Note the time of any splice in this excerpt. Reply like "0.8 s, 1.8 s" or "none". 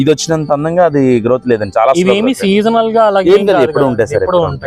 none